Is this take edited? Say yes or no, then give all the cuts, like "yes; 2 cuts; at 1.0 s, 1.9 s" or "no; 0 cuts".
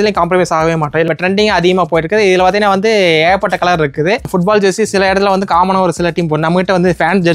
yes; 2 cuts; at 1.1 s, 4.3 s